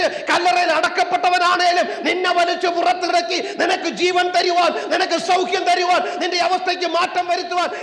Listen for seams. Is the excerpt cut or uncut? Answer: uncut